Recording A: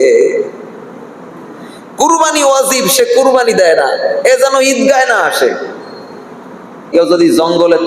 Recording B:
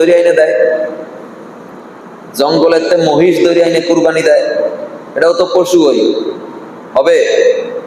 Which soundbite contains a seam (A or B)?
A